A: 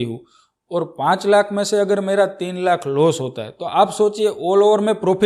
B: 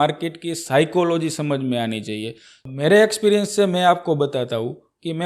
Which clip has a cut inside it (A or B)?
B